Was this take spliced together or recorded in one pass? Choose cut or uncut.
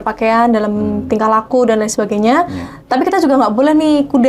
uncut